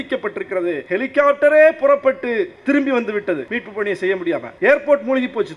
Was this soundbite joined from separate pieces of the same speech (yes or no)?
yes